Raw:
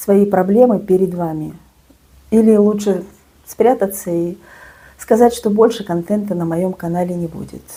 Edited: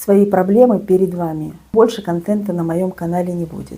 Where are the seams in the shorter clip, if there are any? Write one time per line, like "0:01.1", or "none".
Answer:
0:01.7